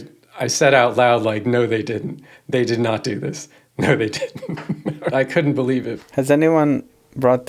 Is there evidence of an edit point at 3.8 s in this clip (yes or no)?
no